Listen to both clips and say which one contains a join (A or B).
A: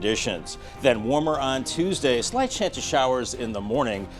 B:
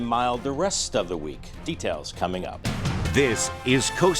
B